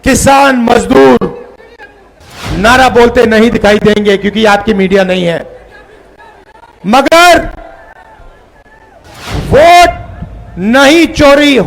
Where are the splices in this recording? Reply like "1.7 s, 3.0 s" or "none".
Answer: 9.0 s